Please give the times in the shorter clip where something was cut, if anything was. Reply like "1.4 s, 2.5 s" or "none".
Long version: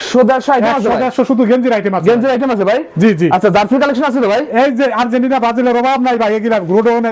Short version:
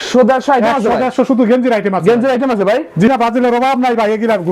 3.1 s